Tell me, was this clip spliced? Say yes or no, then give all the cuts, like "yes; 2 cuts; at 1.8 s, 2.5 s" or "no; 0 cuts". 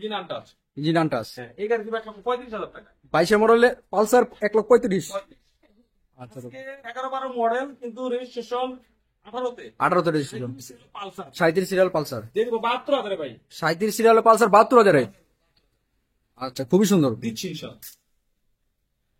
no; 0 cuts